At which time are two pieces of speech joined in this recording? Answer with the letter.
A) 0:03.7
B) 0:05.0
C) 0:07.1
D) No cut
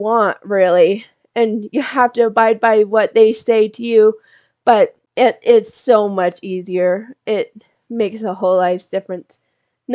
B